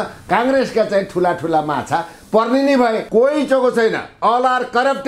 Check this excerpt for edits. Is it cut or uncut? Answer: cut